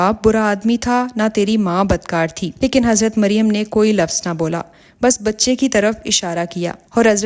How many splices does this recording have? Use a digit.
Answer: 0